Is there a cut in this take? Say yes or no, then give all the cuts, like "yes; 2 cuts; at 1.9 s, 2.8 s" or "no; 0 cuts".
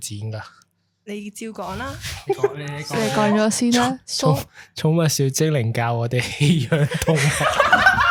no; 0 cuts